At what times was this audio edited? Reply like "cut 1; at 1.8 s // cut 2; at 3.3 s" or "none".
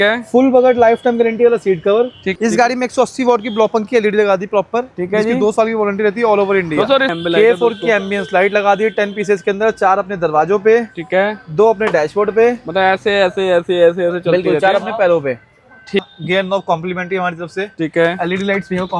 cut 1; at 2.7 s // cut 2; at 7.1 s // cut 3; at 16.0 s